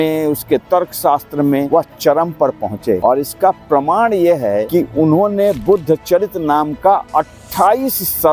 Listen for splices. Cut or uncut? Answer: cut